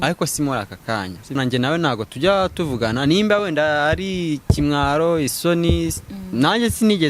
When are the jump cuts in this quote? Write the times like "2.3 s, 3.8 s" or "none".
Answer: 1.4 s